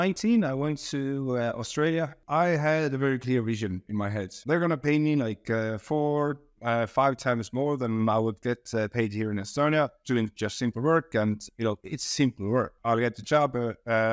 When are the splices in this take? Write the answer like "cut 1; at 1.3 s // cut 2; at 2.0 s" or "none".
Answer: cut 1; at 2.2 s // cut 2; at 4.3 s // cut 3; at 12.8 s